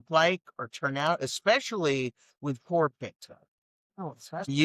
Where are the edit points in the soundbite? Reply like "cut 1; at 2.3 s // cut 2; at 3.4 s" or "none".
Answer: none